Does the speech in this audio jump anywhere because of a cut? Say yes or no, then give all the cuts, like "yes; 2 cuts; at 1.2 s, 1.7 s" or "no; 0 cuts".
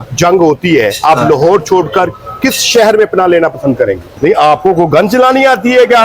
yes; 1 cut; at 4.1 s